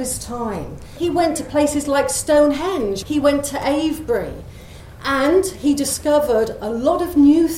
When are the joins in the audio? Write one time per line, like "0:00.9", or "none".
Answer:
0:00.9
0:03.0